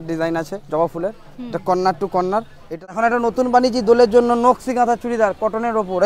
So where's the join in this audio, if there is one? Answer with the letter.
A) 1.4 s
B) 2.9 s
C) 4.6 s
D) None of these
B